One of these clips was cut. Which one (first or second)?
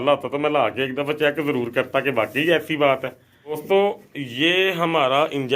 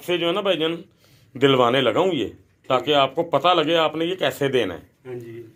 first